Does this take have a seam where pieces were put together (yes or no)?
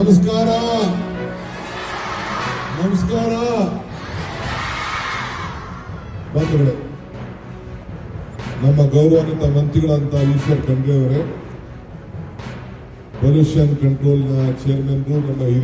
no